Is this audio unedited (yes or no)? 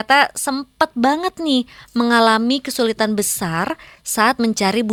yes